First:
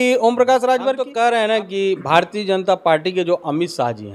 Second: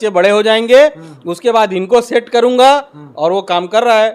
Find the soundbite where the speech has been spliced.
first; 1 cut; at 1.0 s

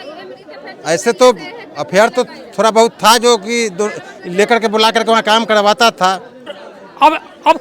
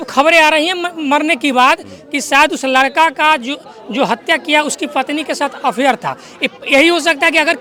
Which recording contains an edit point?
first; 1 cut; at 6.5 s

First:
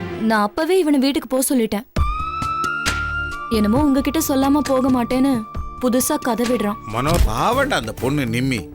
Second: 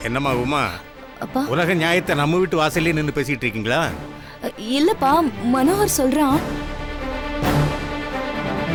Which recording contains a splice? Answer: first; 1 cut; at 7.2 s

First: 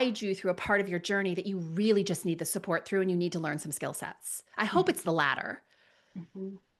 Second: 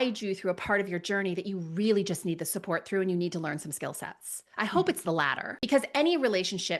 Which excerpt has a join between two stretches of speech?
second; 1 cut; at 5.5 s

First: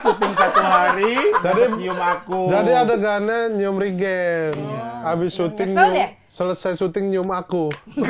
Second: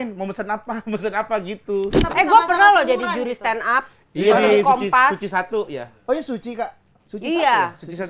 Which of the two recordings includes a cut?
second; 1 cut; at 2.0 s

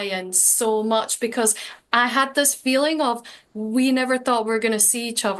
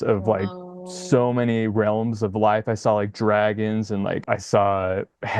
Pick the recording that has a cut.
second; 1 cut; at 4.2 s

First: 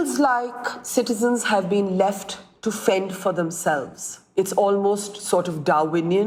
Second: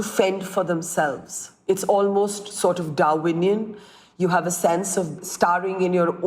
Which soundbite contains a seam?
second; 1 cut; at 5.2 s

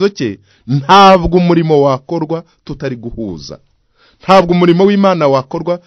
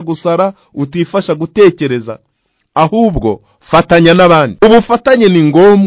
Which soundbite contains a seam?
second; 1 cut; at 4.6 s

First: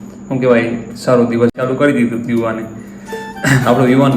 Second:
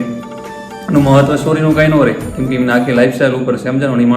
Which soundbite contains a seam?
first; 1 cut; at 1.6 s

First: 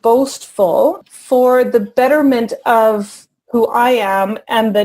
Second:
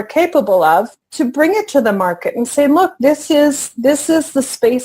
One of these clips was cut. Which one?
first; 1 cut; at 1.0 s

